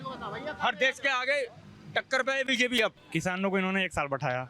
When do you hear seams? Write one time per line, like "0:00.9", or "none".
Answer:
0:03.0